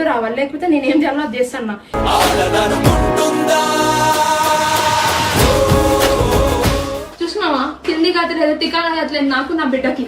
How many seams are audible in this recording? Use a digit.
1